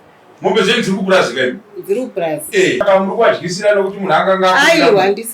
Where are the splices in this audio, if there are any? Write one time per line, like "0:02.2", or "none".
0:02.8